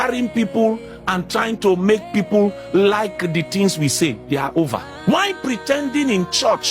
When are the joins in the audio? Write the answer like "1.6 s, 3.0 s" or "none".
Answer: 4.9 s